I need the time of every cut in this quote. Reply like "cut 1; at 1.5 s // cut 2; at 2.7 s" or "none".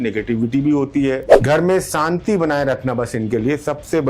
cut 1; at 1.3 s